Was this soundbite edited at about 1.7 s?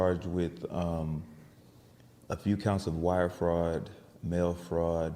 no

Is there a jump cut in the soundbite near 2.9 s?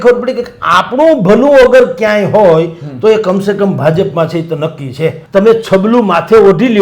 no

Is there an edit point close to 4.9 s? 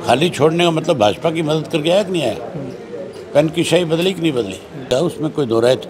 yes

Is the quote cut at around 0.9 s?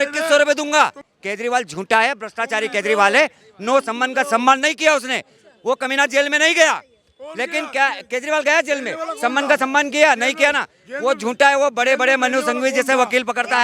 no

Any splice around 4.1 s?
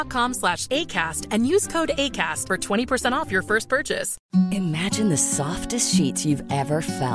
yes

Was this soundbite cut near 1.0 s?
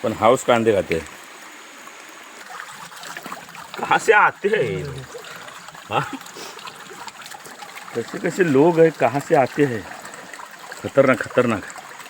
no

